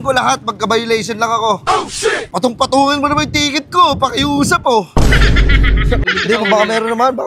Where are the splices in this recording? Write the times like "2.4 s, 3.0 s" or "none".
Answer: 6.0 s

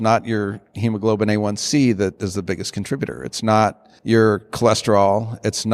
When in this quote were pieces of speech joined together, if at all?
3.9 s

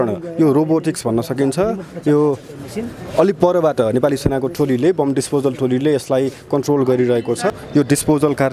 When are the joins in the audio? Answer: 7.5 s

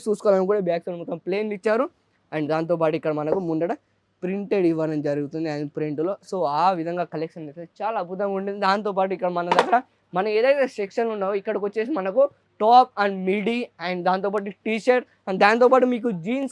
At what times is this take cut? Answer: none

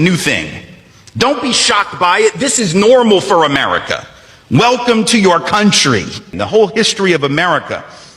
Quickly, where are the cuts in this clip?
6.3 s

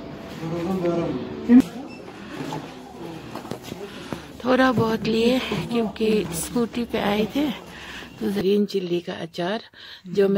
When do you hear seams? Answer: 1.6 s, 8.4 s

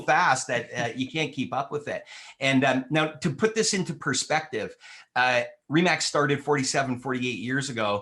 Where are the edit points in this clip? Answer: none

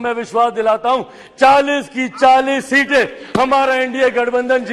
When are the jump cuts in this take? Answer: none

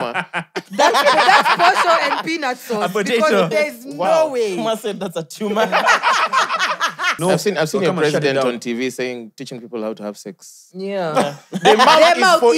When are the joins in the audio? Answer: 7.1 s

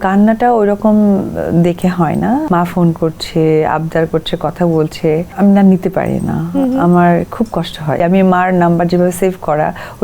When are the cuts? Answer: 2.4 s, 5.3 s, 8.0 s

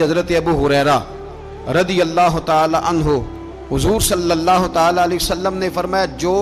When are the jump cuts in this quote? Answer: none

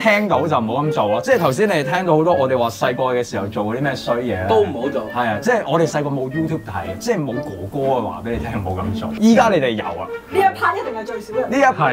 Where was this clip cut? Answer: 9.1 s

